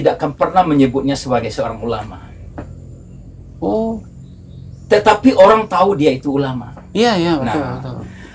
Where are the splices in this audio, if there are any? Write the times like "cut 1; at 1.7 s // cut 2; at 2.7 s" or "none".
none

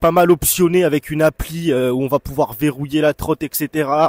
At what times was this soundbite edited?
none

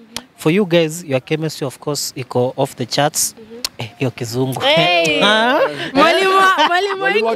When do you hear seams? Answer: none

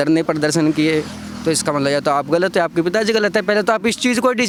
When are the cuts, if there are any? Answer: none

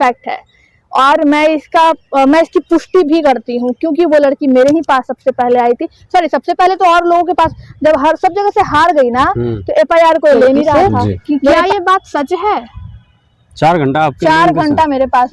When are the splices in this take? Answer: none

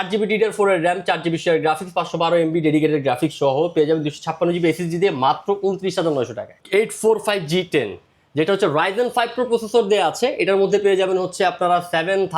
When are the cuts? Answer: cut 1; at 6.6 s

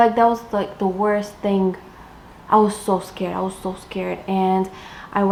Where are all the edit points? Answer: none

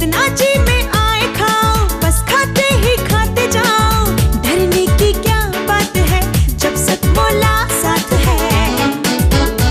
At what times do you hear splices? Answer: none

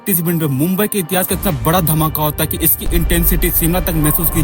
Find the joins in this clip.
none

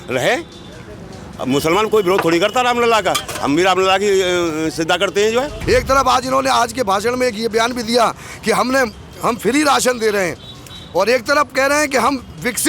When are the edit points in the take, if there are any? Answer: cut 1; at 5.6 s

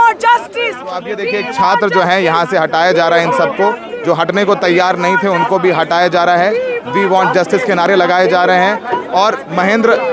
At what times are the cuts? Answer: none

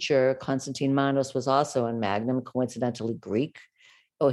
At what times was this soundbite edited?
none

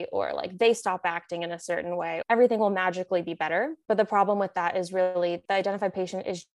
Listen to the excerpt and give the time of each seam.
cut 1; at 2.2 s // cut 2; at 3.8 s // cut 3; at 5.4 s

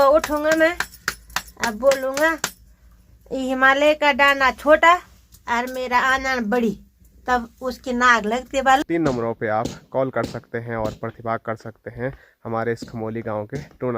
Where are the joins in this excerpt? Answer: cut 1; at 8.8 s

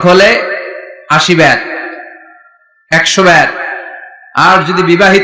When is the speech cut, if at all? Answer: none

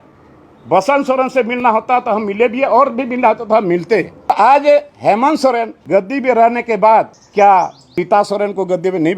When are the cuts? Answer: cut 1; at 4.3 s // cut 2; at 5.7 s // cut 3; at 7.2 s // cut 4; at 7.9 s

